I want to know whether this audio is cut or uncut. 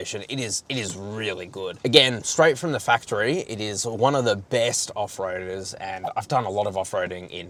uncut